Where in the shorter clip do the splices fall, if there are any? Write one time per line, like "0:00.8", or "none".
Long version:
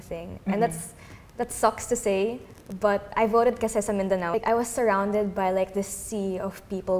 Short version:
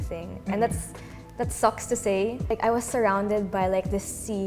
0:02.5